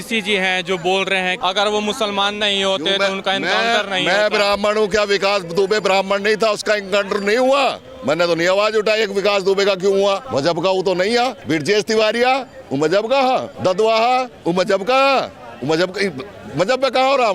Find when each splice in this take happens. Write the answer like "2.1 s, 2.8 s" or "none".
1.4 s, 10.2 s, 11.4 s, 13.5 s

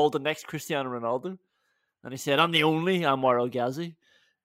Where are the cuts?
none

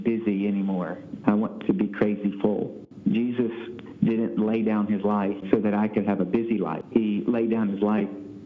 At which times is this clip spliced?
2.8 s, 5.4 s, 6.8 s

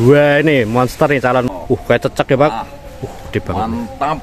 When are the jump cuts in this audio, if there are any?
1.5 s

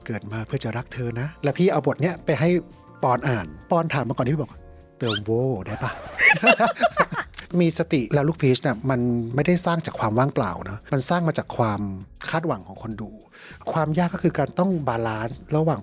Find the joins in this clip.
1.3 s, 3.5 s, 7.4 s, 13.6 s

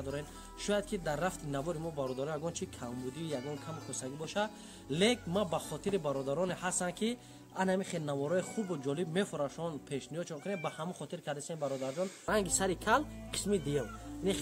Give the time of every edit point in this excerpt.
12.2 s

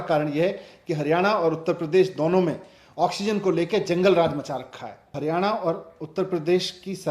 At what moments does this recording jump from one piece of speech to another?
5.2 s

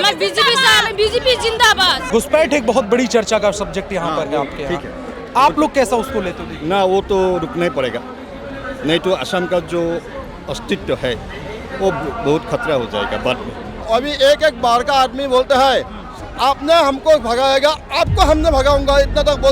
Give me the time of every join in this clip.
2.0 s, 13.8 s

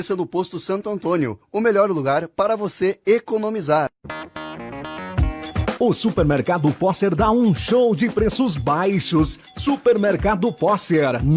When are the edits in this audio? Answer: 4.0 s

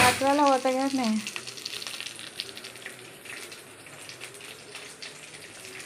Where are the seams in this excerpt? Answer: none

